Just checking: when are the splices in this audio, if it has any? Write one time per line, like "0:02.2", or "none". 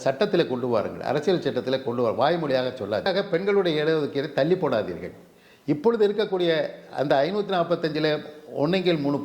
0:03.1